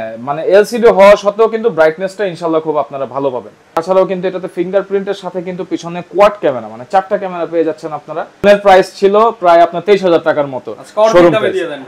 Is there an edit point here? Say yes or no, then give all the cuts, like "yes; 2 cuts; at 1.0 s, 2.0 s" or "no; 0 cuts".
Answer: yes; 2 cuts; at 3.8 s, 8.4 s